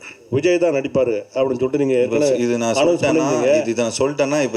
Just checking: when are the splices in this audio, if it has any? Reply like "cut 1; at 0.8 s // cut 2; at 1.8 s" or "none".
none